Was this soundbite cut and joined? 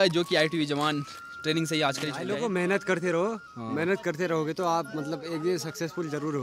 yes; 1 cut; at 2.2 s

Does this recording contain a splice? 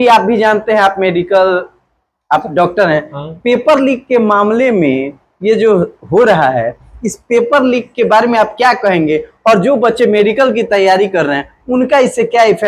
no; 0 cuts

